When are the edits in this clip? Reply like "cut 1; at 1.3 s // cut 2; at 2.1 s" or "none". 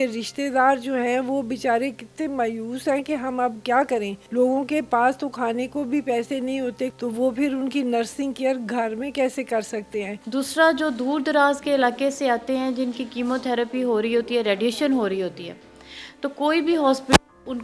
cut 1; at 4.2 s // cut 2; at 6.9 s // cut 3; at 10.2 s